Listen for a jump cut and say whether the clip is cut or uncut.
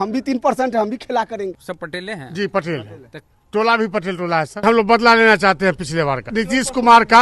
cut